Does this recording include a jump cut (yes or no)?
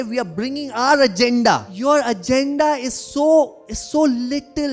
yes